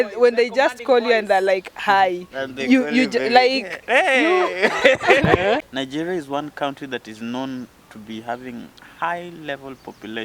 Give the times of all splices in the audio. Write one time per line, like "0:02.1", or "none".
0:05.7